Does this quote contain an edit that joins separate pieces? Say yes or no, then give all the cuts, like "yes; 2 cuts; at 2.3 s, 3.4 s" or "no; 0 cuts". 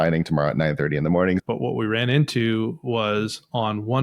yes; 1 cut; at 1.4 s